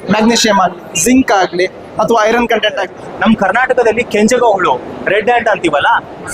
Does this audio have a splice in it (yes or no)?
yes